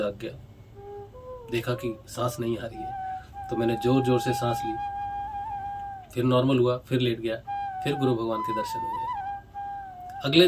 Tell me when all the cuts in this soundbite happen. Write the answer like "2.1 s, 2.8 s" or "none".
none